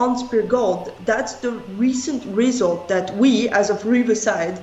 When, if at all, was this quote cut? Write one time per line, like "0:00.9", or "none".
none